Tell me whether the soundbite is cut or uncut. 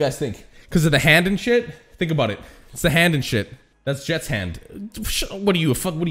cut